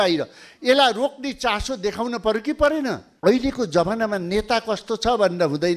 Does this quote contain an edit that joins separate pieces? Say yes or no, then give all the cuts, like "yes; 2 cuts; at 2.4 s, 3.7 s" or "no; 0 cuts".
yes; 1 cut; at 3.1 s